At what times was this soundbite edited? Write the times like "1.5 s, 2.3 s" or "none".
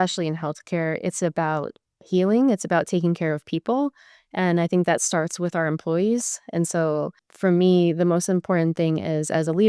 7.2 s